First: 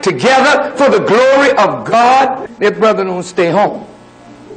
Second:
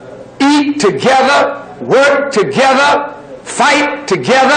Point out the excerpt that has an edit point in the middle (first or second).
first